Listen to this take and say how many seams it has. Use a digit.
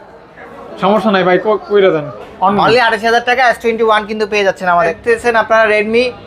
2